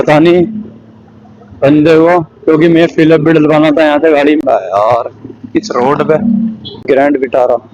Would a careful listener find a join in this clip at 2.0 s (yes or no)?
no